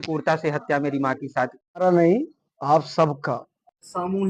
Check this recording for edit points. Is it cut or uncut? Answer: cut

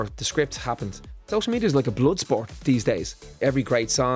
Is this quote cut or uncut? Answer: cut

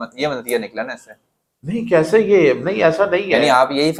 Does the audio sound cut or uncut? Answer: uncut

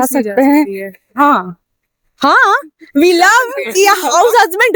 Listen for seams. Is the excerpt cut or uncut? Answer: uncut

